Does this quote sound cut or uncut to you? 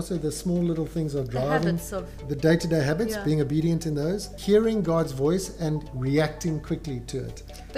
cut